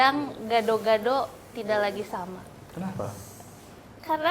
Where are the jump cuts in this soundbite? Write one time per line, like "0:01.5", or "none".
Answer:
none